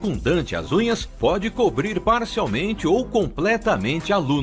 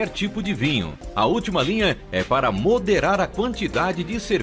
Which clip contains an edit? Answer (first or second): second